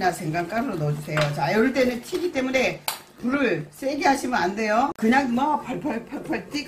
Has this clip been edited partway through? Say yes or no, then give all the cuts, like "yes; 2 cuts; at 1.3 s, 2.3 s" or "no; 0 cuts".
no; 0 cuts